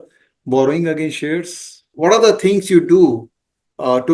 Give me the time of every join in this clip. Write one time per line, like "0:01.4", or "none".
0:01.9

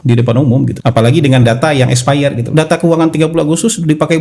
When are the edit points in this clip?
0:02.5

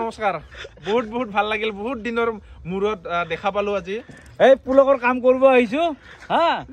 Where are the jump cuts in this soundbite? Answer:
none

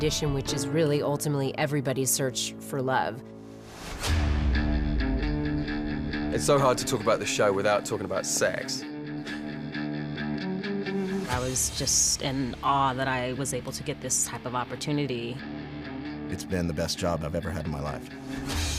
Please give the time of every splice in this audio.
0:04.7

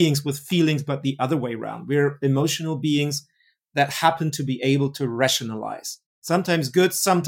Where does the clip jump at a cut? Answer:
0:06.3

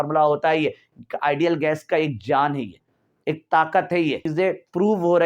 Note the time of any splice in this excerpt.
0:04.2

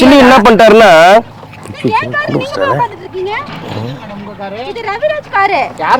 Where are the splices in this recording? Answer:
0:01.4

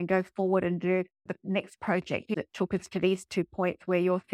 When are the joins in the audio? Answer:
0:01.2
0:02.3

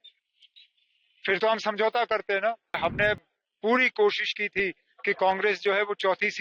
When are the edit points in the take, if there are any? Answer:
0:02.8

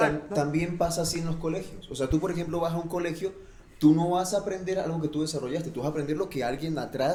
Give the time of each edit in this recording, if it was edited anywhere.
none

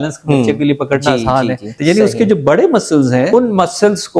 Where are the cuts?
0:01.8
0:03.3

